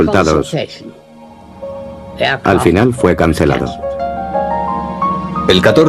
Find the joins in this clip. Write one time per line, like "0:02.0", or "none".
0:02.6